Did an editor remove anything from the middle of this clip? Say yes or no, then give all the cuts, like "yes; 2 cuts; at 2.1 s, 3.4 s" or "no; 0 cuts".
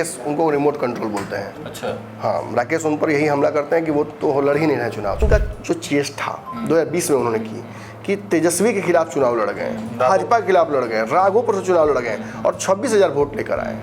yes; 1 cut; at 5.2 s